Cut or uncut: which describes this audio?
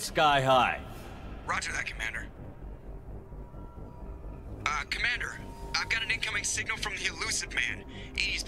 uncut